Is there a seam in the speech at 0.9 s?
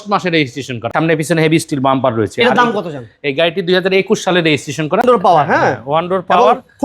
yes; 2 cuts; at 0.9 s, 5.0 s

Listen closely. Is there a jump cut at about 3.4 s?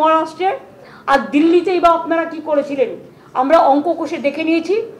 yes; 1 cut; at 3.4 s

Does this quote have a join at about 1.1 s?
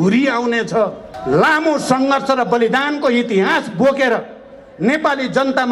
yes; 1 cut; at 1.1 s

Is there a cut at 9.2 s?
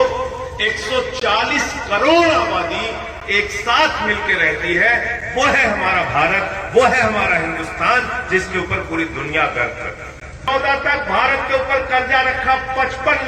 no; 1 cut; at 10.5 s

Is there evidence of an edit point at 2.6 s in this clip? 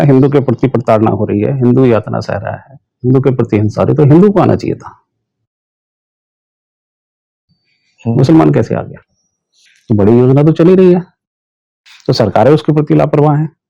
no; 0 cuts

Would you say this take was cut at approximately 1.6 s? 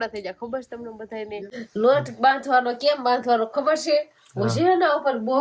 yes; 1 cut; at 1.6 s

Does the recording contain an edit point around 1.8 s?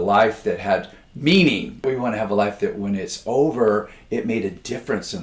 yes; 1 cut; at 1.8 s

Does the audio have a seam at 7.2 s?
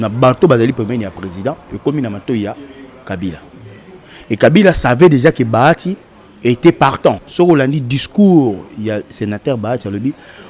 yes; 1 cut; at 7.2 s

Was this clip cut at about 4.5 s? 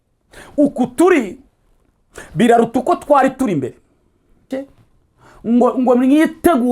yes; 1 cut; at 4.5 s

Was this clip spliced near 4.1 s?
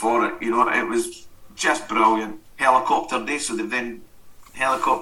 no; 1 cut; at 2.4 s

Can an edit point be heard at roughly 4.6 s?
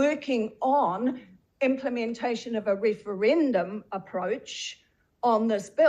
no; 0 cuts

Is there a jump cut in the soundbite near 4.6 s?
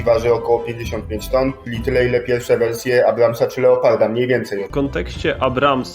yes; 1 cut; at 4.6 s

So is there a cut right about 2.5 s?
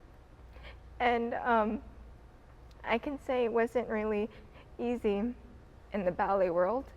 no; 1 cut; at 5.8 s

